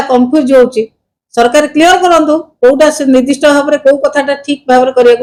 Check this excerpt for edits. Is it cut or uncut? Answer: uncut